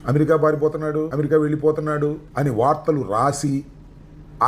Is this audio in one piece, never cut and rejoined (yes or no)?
no